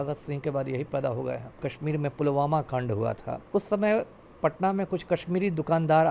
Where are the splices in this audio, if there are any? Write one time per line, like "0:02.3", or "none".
0:01.7
0:03.3